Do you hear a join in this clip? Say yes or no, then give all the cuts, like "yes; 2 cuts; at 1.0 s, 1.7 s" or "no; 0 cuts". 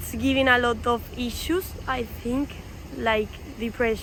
no; 0 cuts